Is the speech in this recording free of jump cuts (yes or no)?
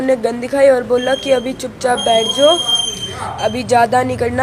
yes